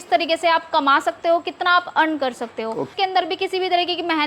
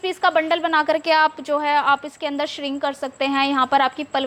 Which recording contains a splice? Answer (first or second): first